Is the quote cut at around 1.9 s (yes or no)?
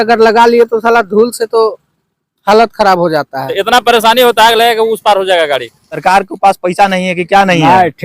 no